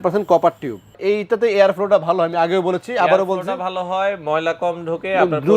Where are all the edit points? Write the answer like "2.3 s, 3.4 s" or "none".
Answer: 0.9 s